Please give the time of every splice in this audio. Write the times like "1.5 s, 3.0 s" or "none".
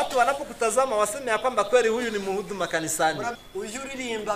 3.4 s